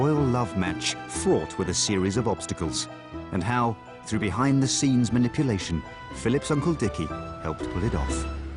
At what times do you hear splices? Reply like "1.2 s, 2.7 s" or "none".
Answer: none